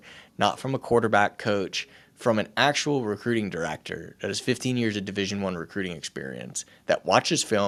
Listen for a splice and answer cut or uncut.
uncut